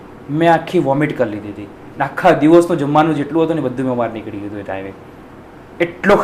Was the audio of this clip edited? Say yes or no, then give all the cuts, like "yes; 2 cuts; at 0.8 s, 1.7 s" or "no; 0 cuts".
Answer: no; 0 cuts